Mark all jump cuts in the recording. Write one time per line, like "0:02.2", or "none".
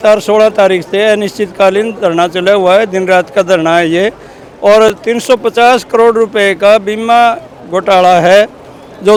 none